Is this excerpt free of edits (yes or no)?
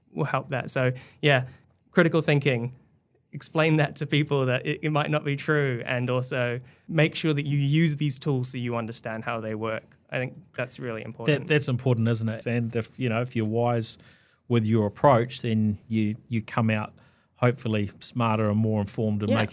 no